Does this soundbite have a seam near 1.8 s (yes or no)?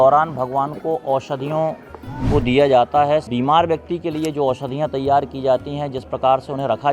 no